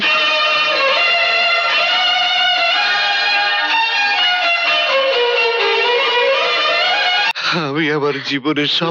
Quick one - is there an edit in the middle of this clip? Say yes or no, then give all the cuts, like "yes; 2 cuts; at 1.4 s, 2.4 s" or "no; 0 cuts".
yes; 1 cut; at 7.3 s